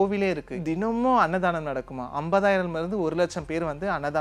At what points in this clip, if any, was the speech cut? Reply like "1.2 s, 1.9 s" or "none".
none